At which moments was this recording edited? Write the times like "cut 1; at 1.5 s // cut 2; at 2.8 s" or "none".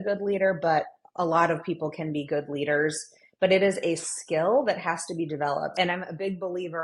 cut 1; at 5.7 s